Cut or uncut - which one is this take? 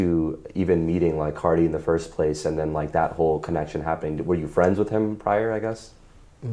uncut